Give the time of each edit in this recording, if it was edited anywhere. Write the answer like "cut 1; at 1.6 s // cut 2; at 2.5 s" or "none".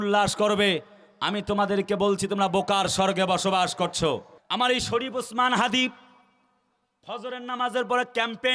cut 1; at 4.4 s